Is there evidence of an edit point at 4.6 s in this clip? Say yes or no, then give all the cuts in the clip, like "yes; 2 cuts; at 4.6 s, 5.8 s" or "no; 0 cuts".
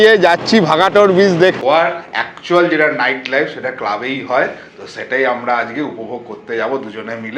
no; 1 cut; at 1.6 s